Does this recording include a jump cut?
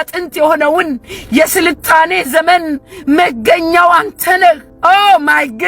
yes; 1 cut; at 4.7 s

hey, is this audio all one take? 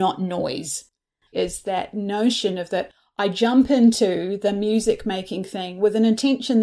no; 1 cut; at 1.3 s

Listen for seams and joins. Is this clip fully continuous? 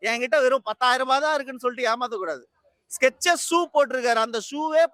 yes; 0 cuts

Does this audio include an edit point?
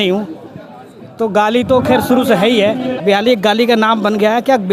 yes; 1 cut; at 3.0 s

